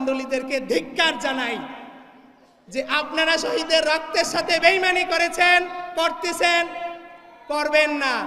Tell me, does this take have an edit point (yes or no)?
no